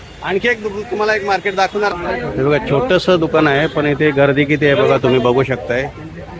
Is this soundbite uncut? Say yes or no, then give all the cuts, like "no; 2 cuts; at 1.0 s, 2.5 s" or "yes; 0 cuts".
no; 1 cut; at 1.9 s